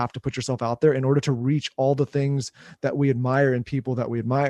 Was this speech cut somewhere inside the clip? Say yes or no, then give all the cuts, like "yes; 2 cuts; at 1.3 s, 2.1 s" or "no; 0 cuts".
no; 0 cuts